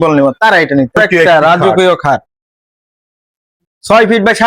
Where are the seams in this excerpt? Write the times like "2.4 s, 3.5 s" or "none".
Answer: 1.0 s